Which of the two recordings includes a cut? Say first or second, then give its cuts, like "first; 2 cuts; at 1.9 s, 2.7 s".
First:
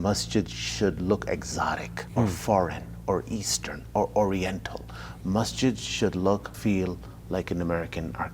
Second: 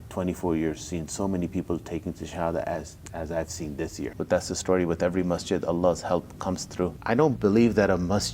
second; 2 cuts; at 4.2 s, 7.0 s